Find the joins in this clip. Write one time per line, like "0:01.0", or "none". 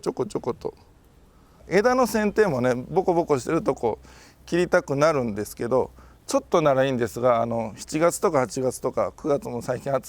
0:01.6